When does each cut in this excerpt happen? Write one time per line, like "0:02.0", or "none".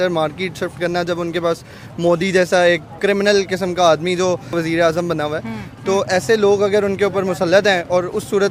0:04.5

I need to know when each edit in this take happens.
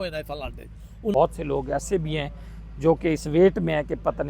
0:01.1

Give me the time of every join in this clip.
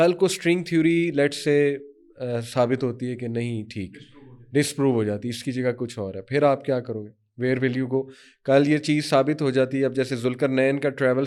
none

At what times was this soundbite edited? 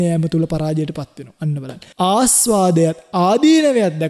0:01.8

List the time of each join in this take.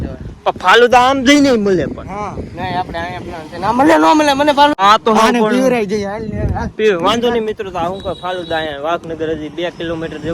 none

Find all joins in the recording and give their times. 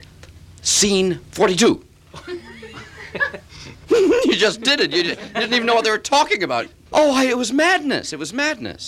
0:06.7

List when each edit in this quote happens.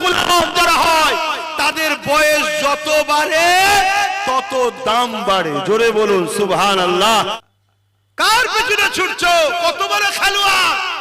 0:07.2

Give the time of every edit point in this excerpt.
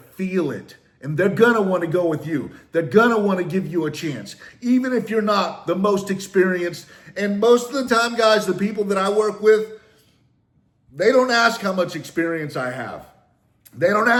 none

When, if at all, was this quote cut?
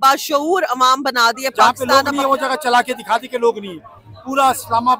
0:01.8

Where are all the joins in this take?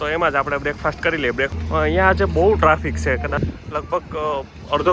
0:01.5
0:03.4

